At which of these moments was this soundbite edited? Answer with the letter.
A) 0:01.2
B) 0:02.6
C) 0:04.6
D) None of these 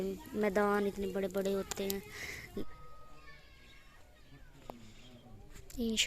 B